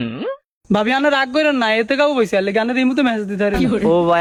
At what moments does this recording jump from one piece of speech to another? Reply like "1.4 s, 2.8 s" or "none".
none